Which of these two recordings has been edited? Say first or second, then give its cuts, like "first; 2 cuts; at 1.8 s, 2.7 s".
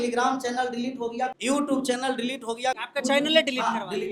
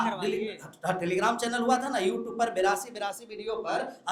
first; 2 cuts; at 1.3 s, 2.8 s